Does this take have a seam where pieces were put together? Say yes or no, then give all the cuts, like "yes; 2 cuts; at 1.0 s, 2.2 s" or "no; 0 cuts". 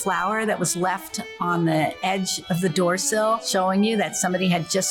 yes; 1 cut; at 3.5 s